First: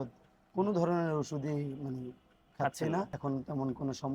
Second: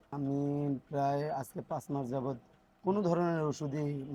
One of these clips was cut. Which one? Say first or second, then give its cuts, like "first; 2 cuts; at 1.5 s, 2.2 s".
first; 1 cut; at 3.1 s